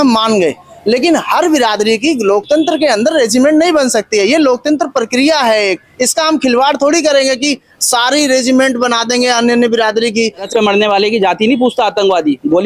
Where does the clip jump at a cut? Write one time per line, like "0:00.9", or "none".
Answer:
0:10.5